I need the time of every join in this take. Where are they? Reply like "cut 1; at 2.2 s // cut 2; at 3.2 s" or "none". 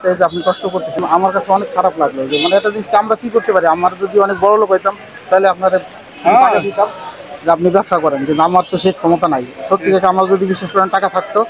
cut 1; at 1.0 s